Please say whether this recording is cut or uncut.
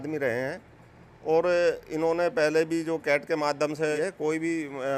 cut